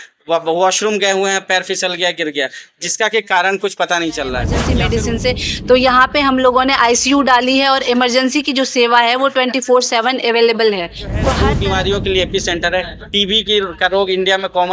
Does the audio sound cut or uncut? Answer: cut